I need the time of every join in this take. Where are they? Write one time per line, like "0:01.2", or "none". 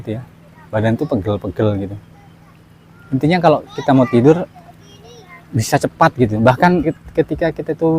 0:06.9